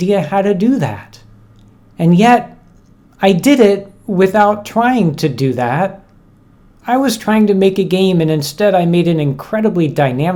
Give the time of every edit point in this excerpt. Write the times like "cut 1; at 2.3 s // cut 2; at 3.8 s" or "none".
none